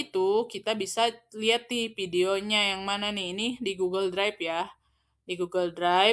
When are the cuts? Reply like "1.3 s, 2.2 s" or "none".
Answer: none